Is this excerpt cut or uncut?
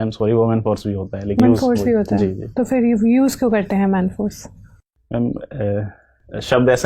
cut